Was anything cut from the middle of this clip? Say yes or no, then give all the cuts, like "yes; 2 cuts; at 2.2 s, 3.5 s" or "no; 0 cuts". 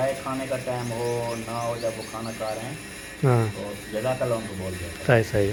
no; 0 cuts